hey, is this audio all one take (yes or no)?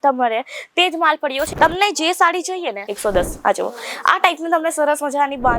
no